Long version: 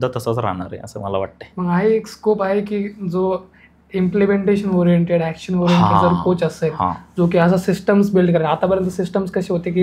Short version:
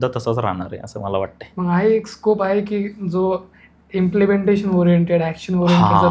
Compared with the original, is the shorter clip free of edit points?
yes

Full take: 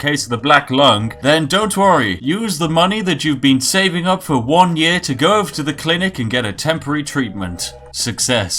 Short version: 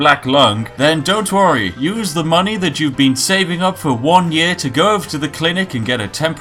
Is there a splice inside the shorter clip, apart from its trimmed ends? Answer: no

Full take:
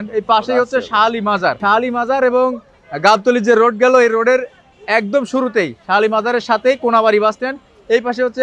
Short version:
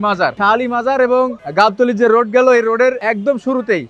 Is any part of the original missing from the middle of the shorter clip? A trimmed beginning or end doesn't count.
yes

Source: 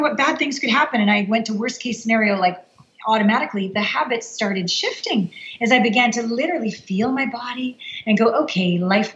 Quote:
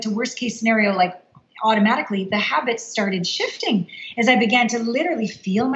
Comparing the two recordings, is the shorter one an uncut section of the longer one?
yes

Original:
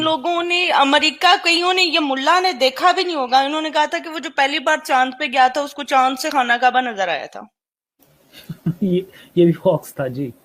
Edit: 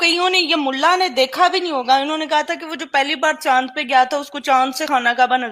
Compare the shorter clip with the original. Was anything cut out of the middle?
no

